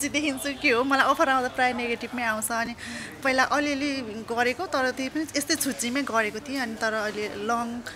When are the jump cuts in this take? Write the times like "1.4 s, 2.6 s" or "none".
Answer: none